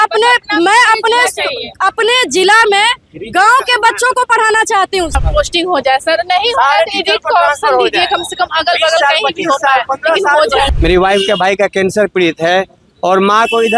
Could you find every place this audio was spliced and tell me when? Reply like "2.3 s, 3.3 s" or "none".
5.1 s, 10.7 s